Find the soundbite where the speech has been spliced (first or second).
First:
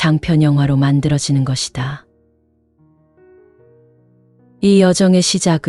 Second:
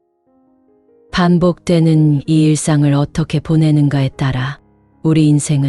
first